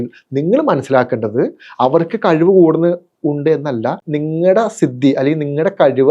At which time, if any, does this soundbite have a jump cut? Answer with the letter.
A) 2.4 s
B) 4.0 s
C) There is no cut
B